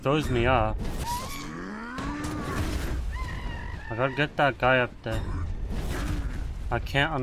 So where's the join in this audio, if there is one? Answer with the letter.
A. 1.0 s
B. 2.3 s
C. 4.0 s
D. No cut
A